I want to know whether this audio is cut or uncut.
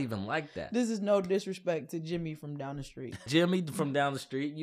cut